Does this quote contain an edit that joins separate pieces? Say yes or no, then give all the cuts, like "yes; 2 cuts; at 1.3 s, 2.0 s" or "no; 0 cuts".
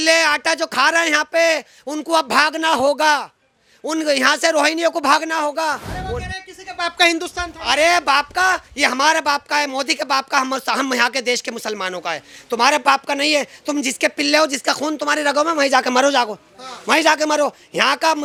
no; 0 cuts